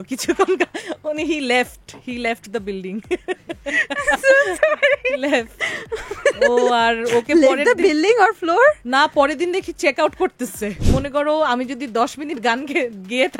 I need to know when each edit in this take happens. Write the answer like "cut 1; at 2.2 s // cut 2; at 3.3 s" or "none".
cut 1; at 10.8 s